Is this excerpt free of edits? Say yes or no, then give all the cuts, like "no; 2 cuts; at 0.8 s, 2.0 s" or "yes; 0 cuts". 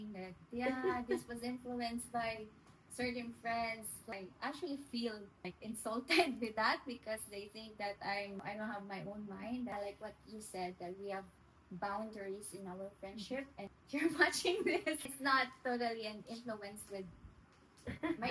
no; 6 cuts; at 4.1 s, 5.5 s, 8.4 s, 9.7 s, 13.7 s, 15.0 s